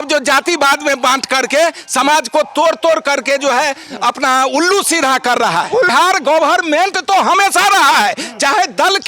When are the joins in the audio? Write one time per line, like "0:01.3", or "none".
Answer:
0:05.9

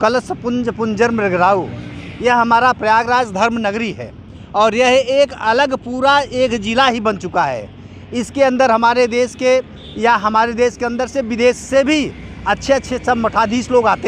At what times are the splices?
none

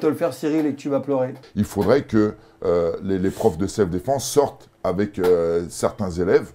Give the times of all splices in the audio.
0:01.4

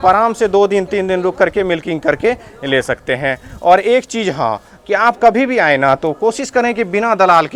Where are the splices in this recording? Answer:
none

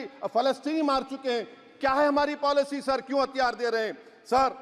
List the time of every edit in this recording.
none

